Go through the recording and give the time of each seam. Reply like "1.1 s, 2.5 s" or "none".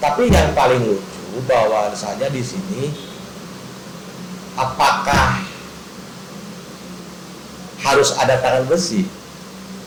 none